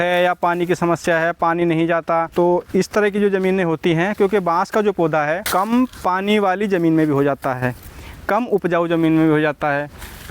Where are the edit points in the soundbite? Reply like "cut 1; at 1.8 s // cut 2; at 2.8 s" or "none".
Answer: cut 1; at 2.3 s // cut 2; at 5.4 s